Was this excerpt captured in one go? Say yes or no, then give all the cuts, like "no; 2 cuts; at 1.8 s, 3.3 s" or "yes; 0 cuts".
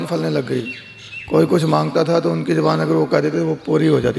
yes; 0 cuts